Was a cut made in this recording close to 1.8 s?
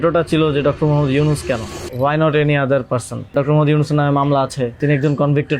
yes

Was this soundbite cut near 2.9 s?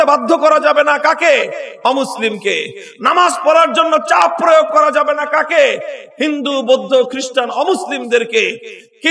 no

